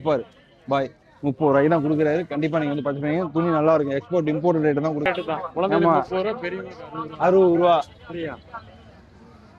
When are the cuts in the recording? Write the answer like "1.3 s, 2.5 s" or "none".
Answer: 5.0 s

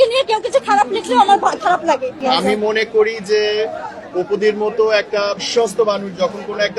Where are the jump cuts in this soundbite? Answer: 2.1 s, 5.3 s

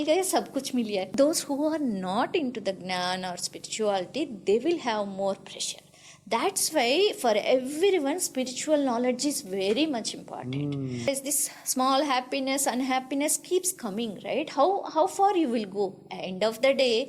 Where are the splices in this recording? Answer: 1.1 s, 11.1 s

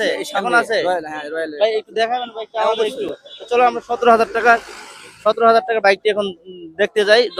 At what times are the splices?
none

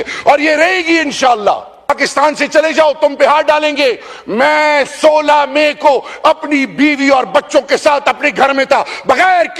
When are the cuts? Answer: 1.9 s

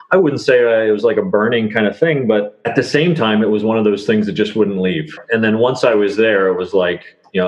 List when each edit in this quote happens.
2.6 s, 5.2 s

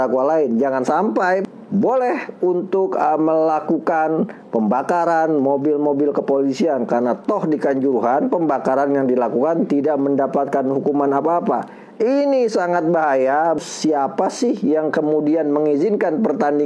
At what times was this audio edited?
1.4 s, 13.6 s

